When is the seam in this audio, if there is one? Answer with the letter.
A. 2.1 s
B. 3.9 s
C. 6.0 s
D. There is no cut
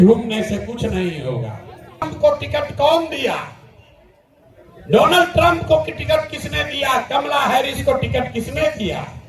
A